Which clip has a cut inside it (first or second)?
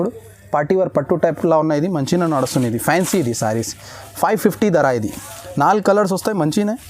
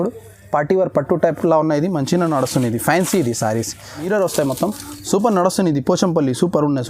second